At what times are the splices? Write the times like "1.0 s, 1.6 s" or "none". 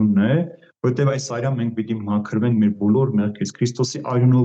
none